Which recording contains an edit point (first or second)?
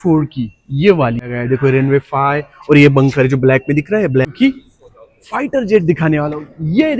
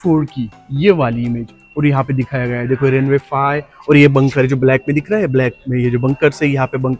first